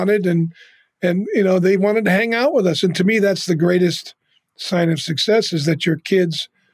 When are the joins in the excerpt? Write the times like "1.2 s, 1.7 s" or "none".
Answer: none